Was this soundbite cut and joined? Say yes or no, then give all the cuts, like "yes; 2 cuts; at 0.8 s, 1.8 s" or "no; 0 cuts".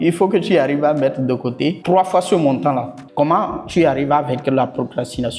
yes; 2 cuts; at 1.8 s, 3.0 s